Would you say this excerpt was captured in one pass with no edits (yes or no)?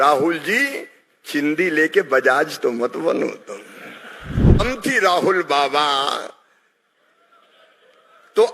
no